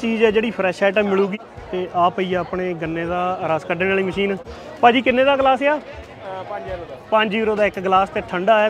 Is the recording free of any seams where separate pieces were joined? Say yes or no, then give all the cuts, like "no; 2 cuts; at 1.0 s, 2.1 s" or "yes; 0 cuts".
no; 2 cuts; at 1.4 s, 4.4 s